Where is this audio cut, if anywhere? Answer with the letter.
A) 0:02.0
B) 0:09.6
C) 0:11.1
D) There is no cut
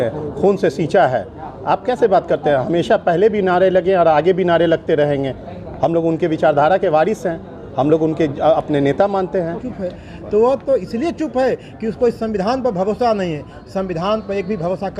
B